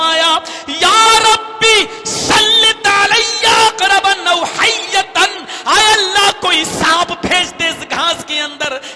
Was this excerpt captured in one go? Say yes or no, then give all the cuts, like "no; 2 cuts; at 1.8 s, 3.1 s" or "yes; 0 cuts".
yes; 0 cuts